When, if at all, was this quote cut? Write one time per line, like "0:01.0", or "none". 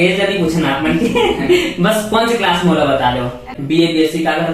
0:03.5